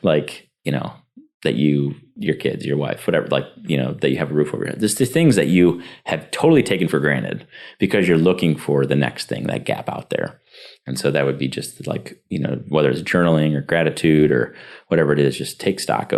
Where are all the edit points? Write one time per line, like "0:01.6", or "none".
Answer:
none